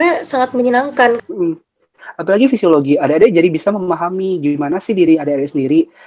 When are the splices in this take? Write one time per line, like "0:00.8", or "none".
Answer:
0:01.2